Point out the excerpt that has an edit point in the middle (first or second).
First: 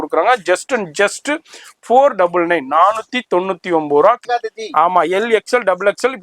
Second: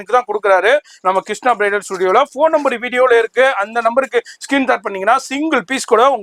first